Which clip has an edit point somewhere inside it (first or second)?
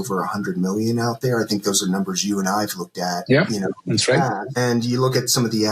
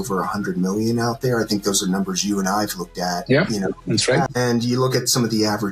second